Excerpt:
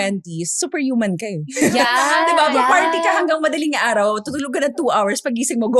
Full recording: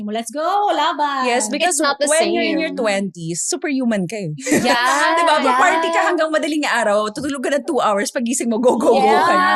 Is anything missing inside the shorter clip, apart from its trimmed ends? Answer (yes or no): no